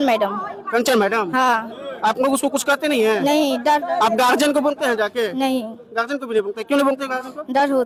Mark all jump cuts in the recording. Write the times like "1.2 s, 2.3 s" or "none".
none